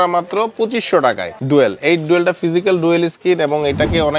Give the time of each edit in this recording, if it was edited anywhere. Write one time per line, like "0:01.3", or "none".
0:01.3